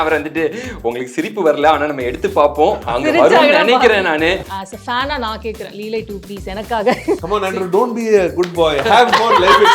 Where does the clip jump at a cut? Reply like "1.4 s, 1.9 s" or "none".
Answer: 2.8 s, 4.5 s, 7.2 s

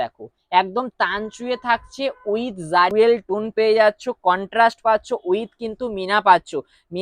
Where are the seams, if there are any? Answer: 2.9 s

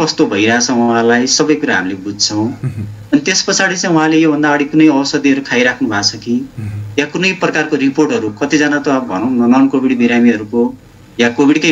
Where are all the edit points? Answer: none

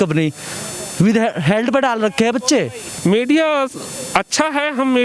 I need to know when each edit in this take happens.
2.8 s

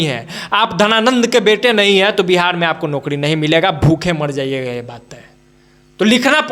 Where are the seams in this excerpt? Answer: none

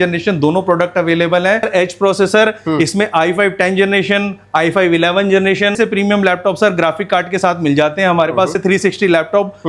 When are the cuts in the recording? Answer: 1.7 s, 5.8 s, 8.6 s

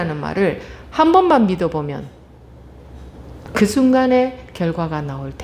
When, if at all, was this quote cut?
3.4 s

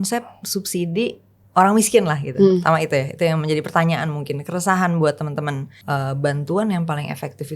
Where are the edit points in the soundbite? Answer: 5.7 s

